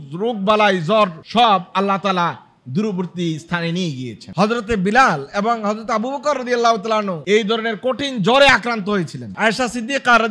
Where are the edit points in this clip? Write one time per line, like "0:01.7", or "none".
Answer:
0:04.2